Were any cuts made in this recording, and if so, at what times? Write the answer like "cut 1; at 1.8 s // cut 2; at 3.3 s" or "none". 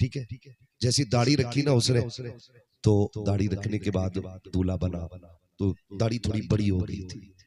none